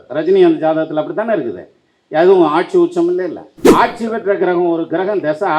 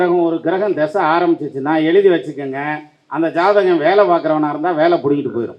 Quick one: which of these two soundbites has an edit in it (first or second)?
first